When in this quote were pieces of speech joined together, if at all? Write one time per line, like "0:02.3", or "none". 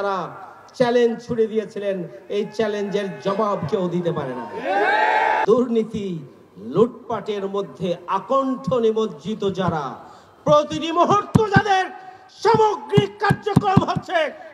0:05.4